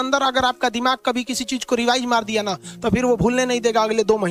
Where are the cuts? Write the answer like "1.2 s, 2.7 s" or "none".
none